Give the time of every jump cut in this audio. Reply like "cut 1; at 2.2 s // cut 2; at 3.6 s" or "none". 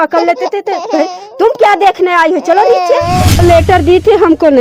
cut 1; at 3.3 s